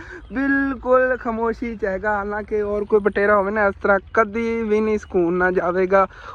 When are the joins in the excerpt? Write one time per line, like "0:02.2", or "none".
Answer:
none